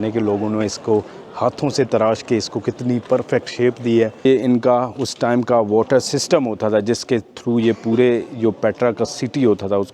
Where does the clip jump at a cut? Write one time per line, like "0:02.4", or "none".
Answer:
0:04.3